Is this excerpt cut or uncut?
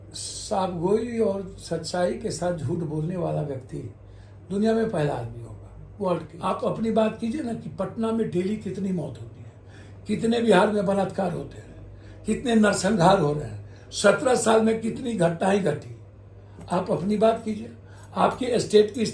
cut